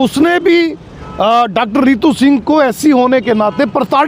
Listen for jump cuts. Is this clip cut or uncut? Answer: uncut